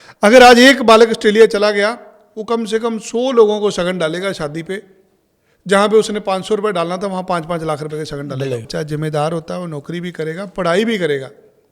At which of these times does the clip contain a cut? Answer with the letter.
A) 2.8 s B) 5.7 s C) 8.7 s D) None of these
C